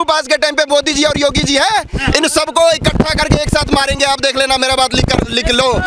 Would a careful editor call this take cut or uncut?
uncut